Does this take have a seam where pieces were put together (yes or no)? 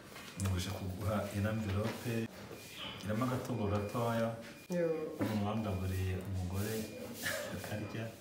yes